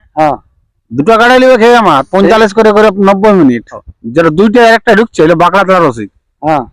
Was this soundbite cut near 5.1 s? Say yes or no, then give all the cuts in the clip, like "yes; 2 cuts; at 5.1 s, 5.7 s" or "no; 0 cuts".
no; 1 cut; at 3.9 s